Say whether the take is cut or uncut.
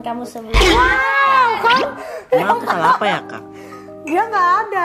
uncut